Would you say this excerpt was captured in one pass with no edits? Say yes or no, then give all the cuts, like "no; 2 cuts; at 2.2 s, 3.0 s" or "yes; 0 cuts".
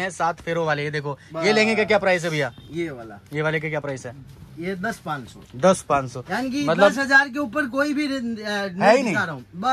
yes; 0 cuts